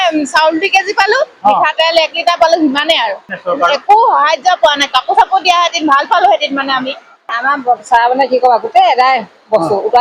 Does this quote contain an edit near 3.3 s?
yes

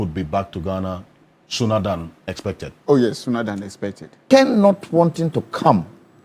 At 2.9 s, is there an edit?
no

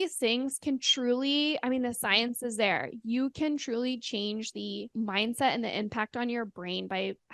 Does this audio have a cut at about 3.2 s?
no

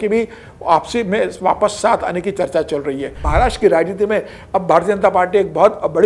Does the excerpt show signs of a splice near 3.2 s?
yes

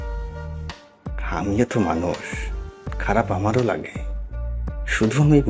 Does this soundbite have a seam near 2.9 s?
no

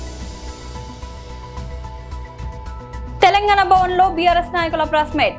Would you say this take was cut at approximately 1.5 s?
no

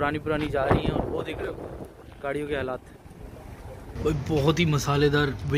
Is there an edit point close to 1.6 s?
no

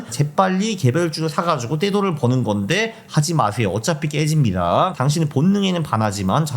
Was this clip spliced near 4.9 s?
yes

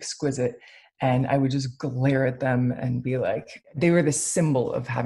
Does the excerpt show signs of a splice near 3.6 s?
yes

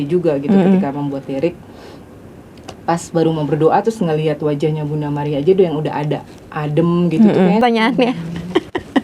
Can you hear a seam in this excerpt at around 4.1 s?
no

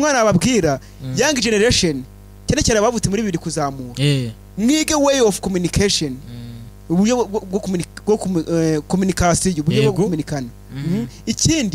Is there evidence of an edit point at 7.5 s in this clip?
no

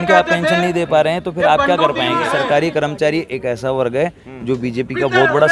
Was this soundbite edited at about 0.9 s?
no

